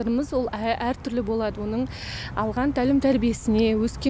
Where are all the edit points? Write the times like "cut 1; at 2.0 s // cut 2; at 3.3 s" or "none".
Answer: none